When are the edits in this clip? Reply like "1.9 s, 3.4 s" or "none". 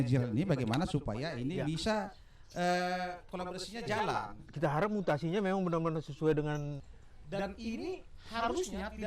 6.8 s